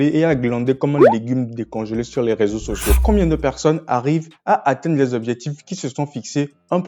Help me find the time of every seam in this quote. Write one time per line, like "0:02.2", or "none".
0:03.0